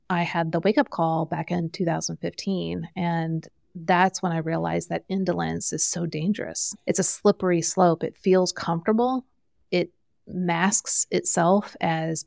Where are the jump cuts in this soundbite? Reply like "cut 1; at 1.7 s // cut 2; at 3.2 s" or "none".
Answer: cut 1; at 6.8 s